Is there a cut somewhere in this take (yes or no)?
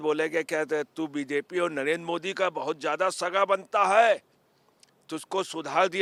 no